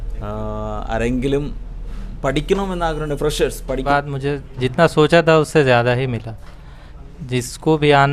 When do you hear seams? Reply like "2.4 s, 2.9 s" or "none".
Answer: 3.8 s